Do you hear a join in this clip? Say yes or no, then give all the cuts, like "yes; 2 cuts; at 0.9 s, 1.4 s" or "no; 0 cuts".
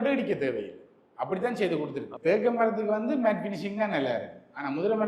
yes; 1 cut; at 2.1 s